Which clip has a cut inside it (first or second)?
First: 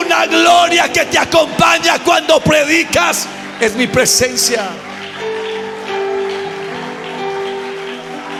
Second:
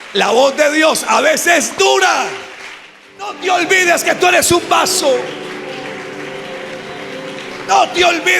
second